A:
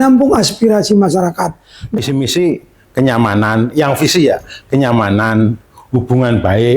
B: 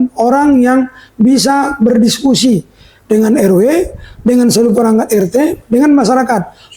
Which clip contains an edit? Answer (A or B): A